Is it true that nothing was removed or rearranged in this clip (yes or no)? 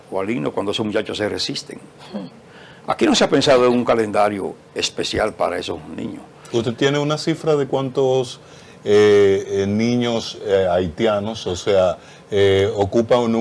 yes